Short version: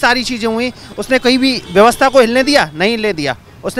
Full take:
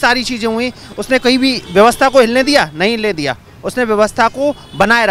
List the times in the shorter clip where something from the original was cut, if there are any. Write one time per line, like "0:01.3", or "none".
none